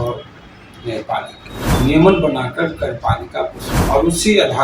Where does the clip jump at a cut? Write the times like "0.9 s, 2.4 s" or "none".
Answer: 1.5 s, 3.7 s